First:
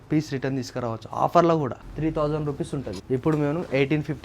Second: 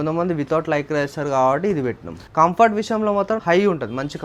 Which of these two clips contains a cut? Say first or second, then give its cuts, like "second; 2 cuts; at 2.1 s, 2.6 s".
first; 2 cuts; at 1.8 s, 2.9 s